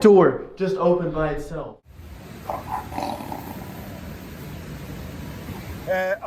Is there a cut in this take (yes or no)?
yes